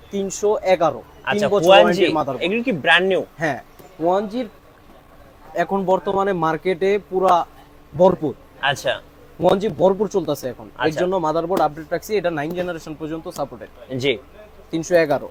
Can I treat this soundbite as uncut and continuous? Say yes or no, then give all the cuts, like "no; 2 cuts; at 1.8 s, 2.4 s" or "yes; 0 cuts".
yes; 0 cuts